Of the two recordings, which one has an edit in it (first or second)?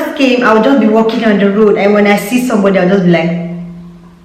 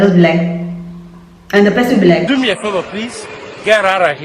second